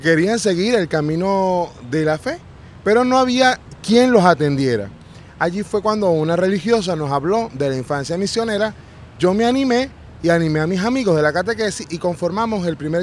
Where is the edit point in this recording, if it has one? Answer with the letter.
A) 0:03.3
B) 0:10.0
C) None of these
B